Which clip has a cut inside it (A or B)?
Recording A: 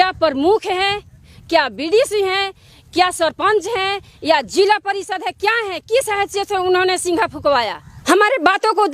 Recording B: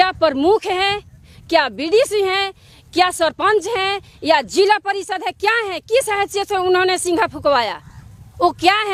A